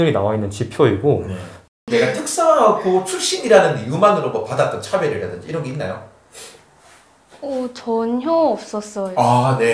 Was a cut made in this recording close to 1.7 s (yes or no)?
yes